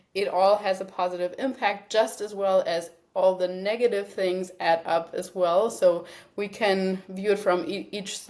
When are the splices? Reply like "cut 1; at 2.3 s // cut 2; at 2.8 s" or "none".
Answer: none